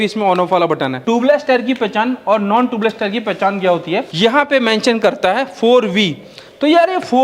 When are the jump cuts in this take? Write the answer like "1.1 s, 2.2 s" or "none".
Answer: 1.0 s, 4.1 s